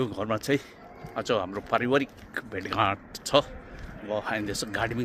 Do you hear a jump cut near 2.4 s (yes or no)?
no